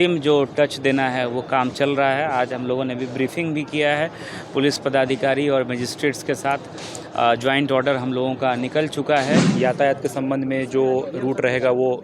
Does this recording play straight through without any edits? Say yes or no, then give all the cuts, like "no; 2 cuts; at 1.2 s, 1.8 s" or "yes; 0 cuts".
no; 1 cut; at 9.5 s